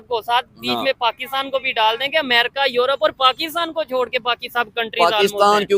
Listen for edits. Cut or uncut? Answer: uncut